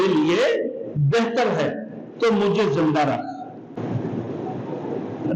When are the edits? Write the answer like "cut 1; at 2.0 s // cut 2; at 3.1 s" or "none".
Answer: none